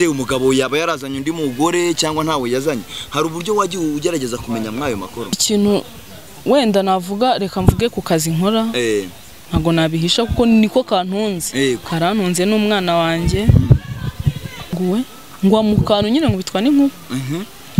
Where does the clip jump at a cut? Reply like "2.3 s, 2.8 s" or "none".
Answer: 5.4 s, 14.7 s